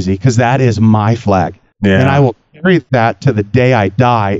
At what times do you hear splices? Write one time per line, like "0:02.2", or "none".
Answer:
0:01.6
0:02.9